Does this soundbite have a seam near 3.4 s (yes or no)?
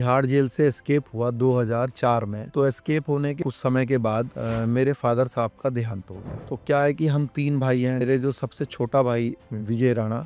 yes